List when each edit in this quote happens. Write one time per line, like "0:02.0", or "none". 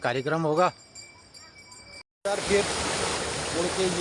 0:02.1